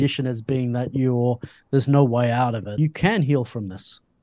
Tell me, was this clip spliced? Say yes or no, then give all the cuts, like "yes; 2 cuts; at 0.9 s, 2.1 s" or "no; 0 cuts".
yes; 1 cut; at 2.8 s